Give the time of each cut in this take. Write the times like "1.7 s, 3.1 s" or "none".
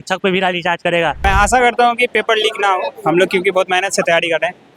1.2 s